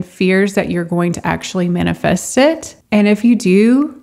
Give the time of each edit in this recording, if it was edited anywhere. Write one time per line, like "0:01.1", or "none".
0:02.7